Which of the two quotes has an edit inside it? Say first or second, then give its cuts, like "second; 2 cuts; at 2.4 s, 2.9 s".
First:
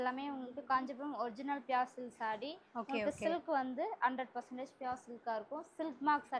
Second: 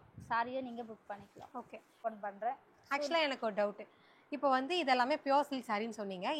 second; 1 cut; at 2.0 s